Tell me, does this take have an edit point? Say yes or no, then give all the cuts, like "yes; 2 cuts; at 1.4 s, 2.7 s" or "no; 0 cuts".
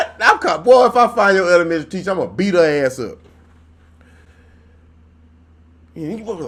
no; 0 cuts